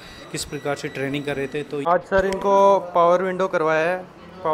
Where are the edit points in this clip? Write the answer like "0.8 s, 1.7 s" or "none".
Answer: 1.8 s

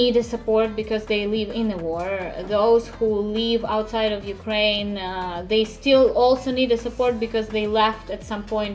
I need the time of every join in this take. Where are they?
none

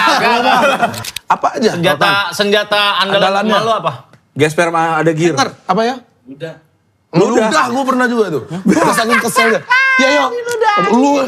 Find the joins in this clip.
1.1 s

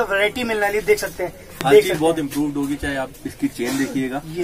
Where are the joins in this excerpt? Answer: 1.6 s

